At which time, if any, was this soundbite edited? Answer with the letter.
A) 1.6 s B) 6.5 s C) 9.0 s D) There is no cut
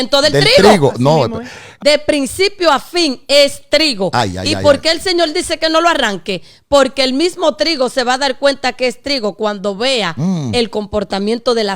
A